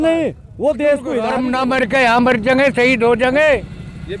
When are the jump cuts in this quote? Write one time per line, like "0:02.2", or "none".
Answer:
0:01.4